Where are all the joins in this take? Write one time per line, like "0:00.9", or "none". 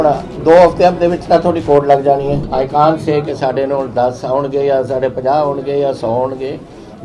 0:02.5